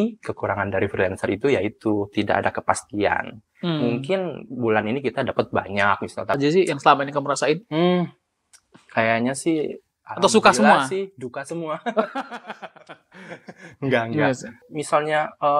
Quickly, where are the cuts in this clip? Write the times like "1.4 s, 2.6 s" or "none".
6.4 s, 14.7 s